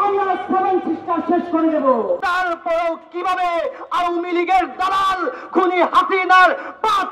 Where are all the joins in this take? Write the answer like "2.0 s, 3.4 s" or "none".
2.2 s